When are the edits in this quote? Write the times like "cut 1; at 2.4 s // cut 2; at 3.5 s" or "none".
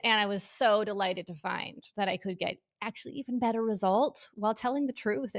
none

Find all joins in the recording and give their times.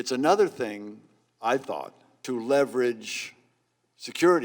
cut 1; at 2.1 s

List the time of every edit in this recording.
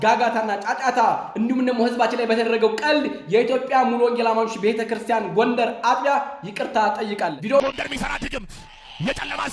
cut 1; at 7.6 s

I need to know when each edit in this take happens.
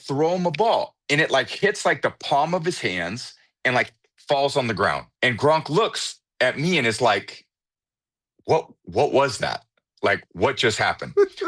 cut 1; at 5.1 s

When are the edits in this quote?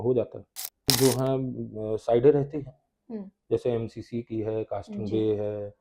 cut 1; at 0.9 s

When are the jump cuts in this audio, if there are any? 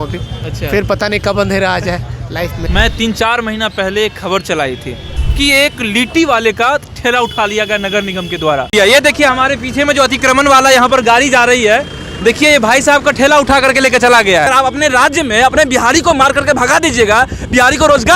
cut 1; at 2.7 s // cut 2; at 5.1 s

